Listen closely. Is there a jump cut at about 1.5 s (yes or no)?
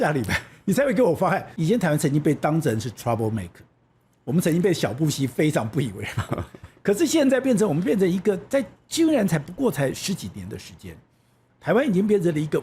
yes